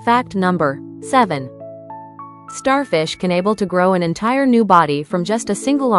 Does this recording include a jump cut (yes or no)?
yes